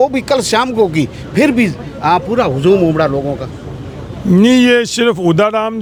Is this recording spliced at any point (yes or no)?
no